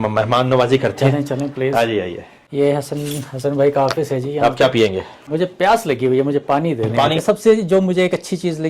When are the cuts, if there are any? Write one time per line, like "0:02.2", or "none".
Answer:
0:07.2